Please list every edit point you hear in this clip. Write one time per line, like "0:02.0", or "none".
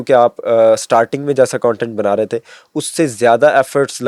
none